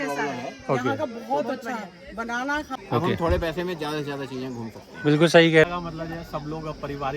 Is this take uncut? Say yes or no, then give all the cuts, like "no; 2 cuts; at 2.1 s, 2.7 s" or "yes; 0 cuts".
no; 2 cuts; at 2.7 s, 5.7 s